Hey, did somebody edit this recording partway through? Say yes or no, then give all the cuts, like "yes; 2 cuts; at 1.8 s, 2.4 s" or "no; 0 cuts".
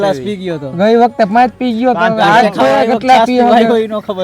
no; 0 cuts